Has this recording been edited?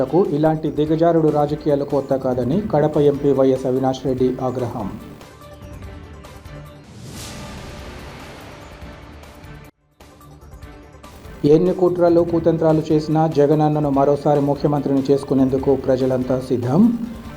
no; 0 cuts

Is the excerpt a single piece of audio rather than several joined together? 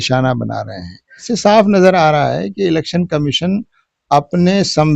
no; 1 cut; at 1.2 s

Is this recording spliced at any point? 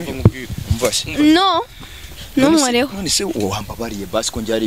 no; 0 cuts

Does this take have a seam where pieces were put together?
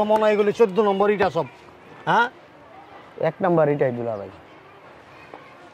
no; 0 cuts

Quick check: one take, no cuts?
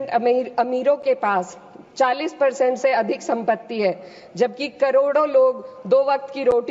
yes; 0 cuts

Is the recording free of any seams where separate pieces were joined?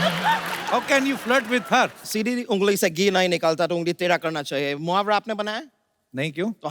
no; 1 cut; at 2.0 s

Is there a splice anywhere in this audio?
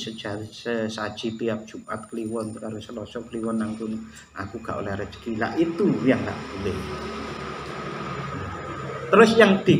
no; 0 cuts

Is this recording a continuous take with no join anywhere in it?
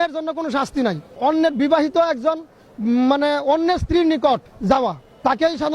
no; 2 cuts; at 1.1 s, 4.7 s

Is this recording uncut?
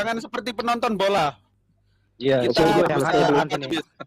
yes; 0 cuts

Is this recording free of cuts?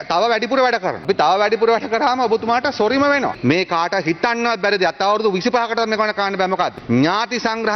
no; 3 cuts; at 1.1 s, 3.4 s, 6.8 s

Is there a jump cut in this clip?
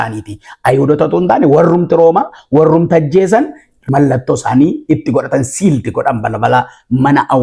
yes; 1 cut; at 3.8 s

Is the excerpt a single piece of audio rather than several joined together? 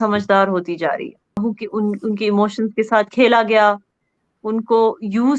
no; 1 cut; at 1.4 s

